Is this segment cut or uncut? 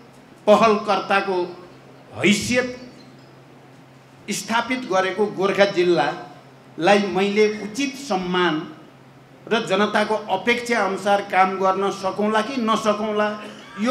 uncut